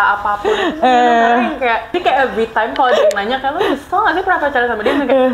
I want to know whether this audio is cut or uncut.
cut